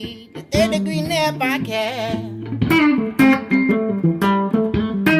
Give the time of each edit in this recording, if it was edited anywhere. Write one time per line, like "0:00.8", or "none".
none